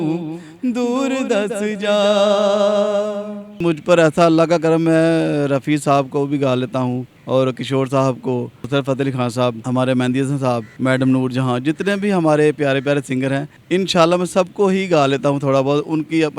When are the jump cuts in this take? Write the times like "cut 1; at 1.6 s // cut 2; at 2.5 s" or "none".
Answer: cut 1; at 3.6 s // cut 2; at 7.1 s // cut 3; at 8.6 s // cut 4; at 9.6 s // cut 5; at 10.7 s // cut 6; at 13.5 s